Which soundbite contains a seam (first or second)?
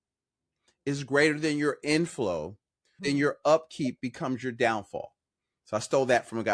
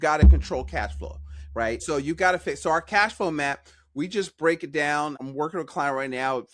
second